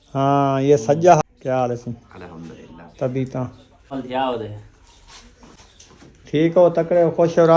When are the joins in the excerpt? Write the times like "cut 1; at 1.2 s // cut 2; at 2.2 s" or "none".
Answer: cut 1; at 1.2 s // cut 2; at 3.9 s // cut 3; at 5.6 s